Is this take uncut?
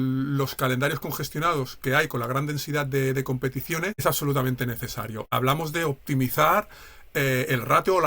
no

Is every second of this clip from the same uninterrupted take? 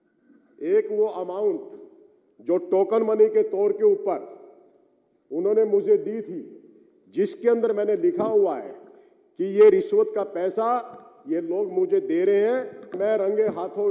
no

